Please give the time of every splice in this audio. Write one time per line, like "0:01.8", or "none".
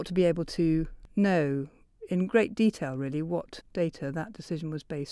0:01.0
0:03.6